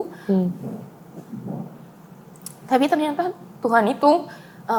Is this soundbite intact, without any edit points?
yes; 0 cuts

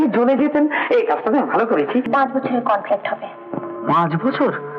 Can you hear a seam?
yes; 1 cut; at 2.1 s

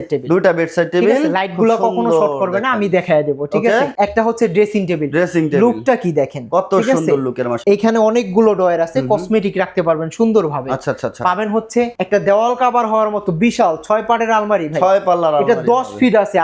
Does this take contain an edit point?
no; 0 cuts

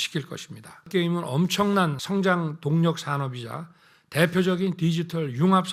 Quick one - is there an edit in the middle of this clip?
yes; 2 cuts; at 0.9 s, 2.0 s

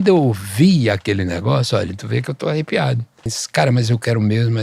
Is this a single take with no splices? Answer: no; 1 cut; at 3.4 s

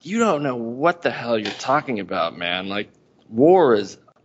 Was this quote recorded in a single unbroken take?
yes; 0 cuts

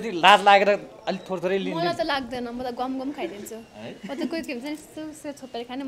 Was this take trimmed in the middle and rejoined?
no; 0 cuts

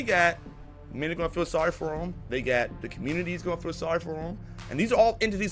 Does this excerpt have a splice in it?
no; 0 cuts

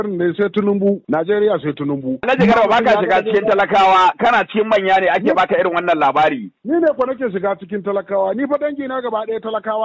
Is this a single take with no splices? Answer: no; 1 cut; at 1.0 s

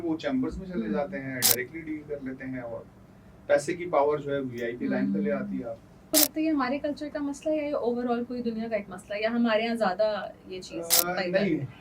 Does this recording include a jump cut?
yes; 1 cut; at 6.1 s

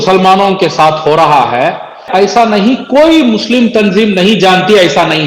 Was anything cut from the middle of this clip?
yes; 1 cut; at 2.1 s

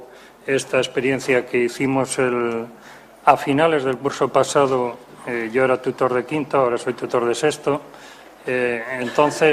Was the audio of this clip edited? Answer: no; 0 cuts

